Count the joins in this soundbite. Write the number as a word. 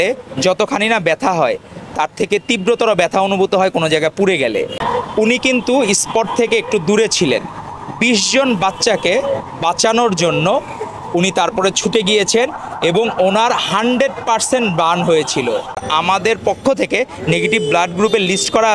two